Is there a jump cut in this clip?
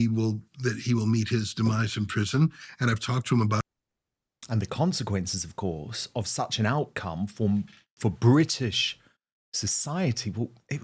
no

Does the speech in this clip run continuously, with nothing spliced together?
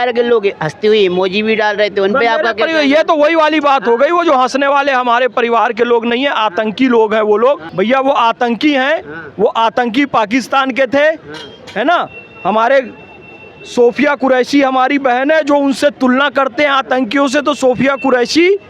yes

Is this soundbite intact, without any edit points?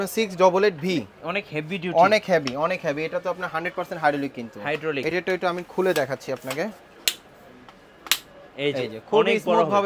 yes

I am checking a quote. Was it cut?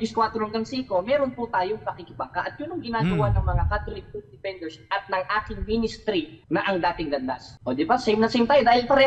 yes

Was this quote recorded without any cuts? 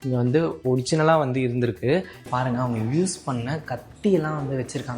no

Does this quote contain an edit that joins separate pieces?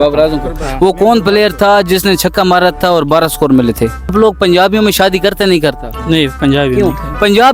yes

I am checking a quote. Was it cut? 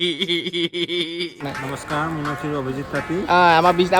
yes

